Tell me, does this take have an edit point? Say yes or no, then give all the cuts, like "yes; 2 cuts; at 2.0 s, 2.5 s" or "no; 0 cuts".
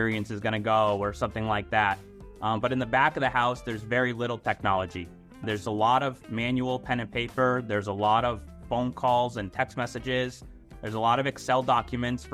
no; 0 cuts